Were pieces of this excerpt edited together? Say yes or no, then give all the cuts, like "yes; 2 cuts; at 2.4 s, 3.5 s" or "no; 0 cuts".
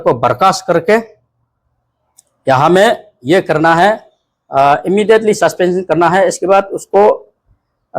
no; 0 cuts